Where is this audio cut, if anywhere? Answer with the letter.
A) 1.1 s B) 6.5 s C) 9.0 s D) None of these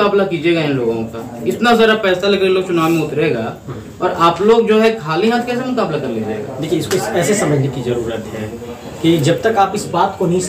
D